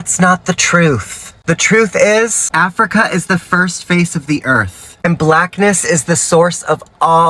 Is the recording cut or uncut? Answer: uncut